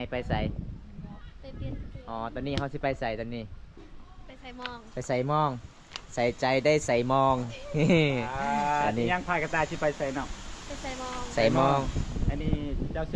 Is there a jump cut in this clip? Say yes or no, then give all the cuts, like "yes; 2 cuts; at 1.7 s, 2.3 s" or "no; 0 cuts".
no; 0 cuts